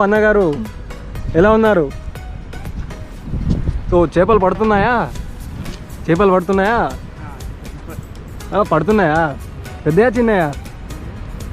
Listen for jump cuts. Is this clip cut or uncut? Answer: uncut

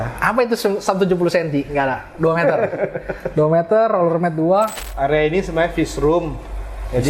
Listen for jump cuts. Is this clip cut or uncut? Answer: cut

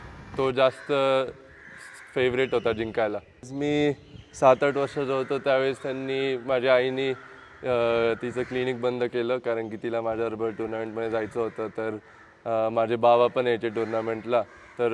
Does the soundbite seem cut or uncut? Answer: cut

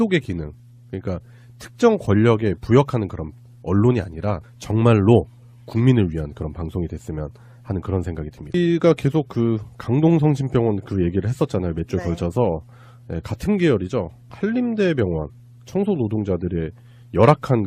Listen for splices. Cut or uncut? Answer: uncut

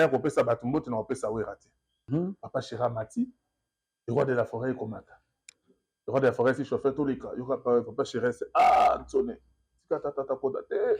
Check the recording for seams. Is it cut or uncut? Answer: cut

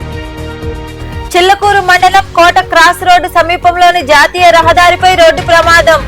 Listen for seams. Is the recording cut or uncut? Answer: cut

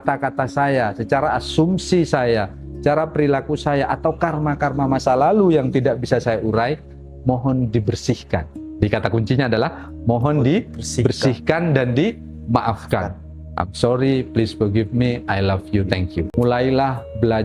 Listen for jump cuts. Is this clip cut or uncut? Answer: cut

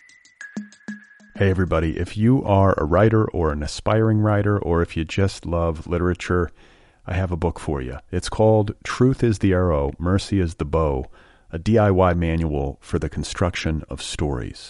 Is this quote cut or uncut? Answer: cut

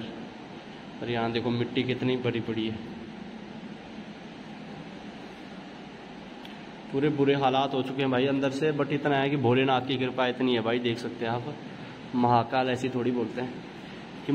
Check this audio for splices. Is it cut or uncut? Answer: uncut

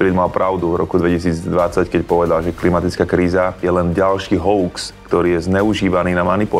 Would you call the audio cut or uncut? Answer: cut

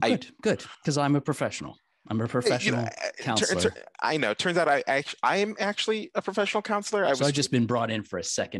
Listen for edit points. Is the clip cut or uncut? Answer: cut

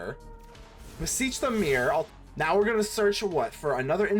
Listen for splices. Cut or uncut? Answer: cut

